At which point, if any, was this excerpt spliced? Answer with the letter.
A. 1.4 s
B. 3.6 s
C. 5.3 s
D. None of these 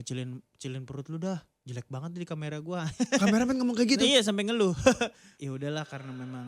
C